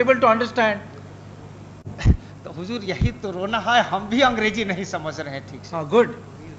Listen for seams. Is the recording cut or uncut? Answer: uncut